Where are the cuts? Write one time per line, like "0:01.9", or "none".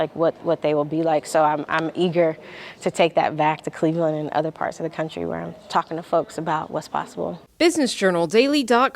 0:07.3

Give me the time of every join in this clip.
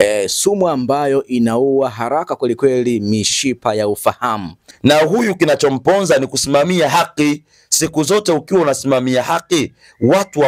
0:04.6

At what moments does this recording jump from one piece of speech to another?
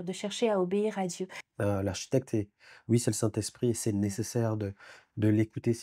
0:01.4

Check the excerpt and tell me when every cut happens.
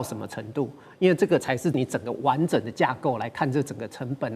0:01.8

